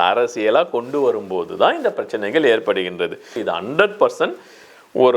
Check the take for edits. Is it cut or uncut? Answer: cut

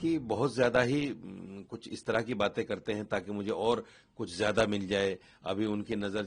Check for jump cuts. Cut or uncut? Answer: uncut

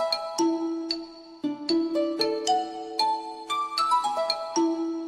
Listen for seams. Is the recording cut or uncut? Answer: cut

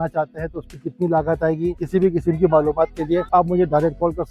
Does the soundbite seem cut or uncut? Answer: cut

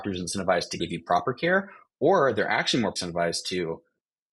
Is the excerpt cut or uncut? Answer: cut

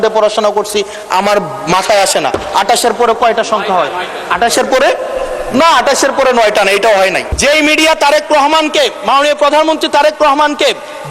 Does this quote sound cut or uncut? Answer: cut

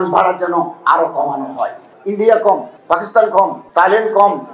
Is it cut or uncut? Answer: cut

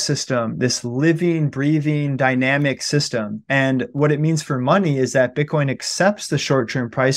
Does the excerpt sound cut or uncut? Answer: uncut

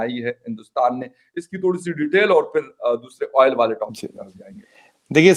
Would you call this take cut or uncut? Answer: uncut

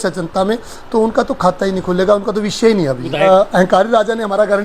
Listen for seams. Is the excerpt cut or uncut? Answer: cut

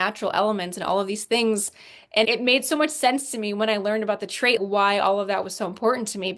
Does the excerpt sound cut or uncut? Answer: uncut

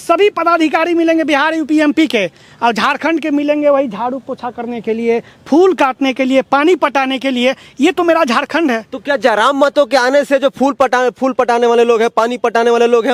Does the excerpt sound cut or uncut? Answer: uncut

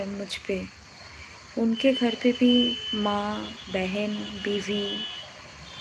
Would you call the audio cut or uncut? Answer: uncut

